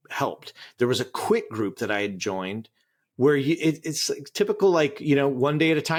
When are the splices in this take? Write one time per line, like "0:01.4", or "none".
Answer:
none

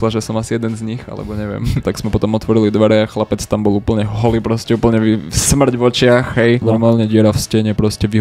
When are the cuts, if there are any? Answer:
0:01.9
0:06.6

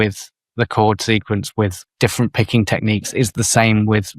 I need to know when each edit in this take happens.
0:01.8

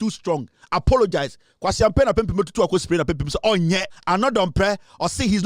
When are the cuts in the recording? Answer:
0:03.9

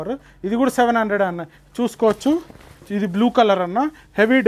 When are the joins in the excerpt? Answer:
0:02.9

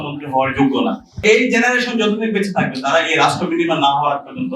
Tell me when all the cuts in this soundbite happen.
0:01.2

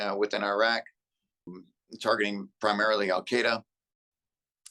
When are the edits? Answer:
0:01.5

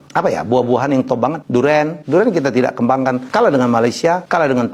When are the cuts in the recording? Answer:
none

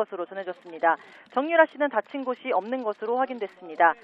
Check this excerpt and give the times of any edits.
0:01.1

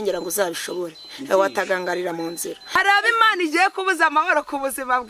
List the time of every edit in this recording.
0:02.8

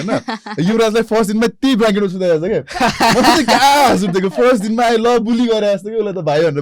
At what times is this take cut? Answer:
none

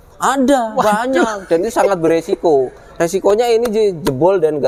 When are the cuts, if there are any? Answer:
none

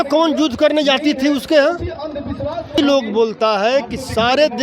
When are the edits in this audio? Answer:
0:02.8

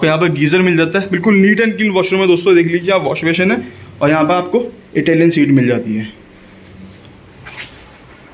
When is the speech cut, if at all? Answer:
none

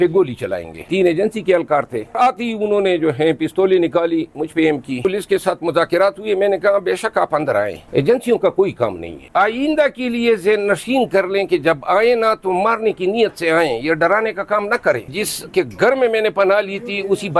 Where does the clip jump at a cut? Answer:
0:00.9
0:02.2
0:05.1
0:09.2
0:15.1

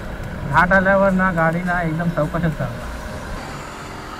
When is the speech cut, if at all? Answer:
0:03.3

